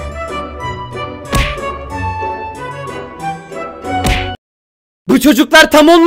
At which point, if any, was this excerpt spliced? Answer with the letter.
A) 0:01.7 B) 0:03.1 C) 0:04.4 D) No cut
C